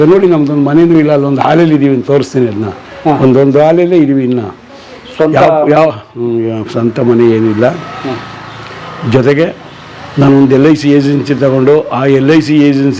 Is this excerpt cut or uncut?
uncut